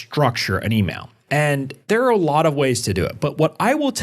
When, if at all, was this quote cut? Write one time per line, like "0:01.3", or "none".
0:01.8